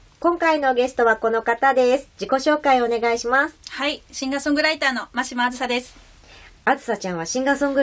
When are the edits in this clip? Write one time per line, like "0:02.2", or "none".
none

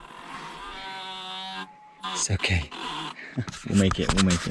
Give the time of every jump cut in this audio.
none

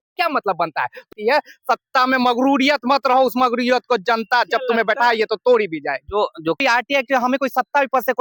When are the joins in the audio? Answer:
0:01.1
0:06.6

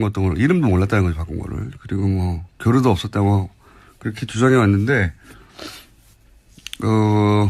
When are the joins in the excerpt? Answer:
none

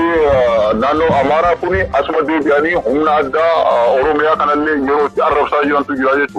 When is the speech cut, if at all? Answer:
none

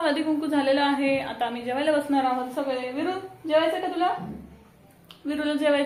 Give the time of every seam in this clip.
none

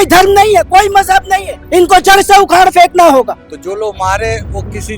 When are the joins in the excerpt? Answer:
0:01.5
0:03.5

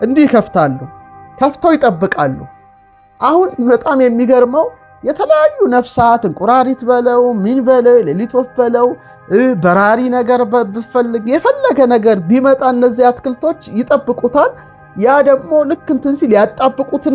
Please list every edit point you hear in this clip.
none

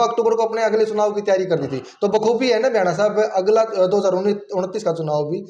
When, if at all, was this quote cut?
none

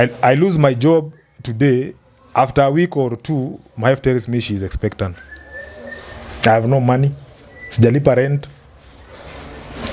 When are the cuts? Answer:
none

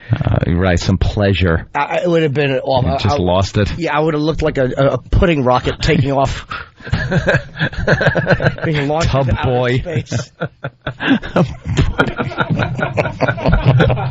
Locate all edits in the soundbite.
none

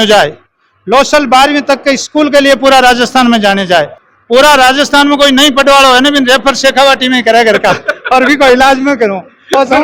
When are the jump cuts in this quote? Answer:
0:04.0

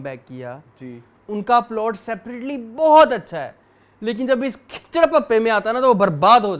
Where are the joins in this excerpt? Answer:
none

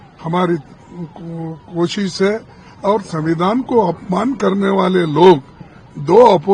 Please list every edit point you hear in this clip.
none

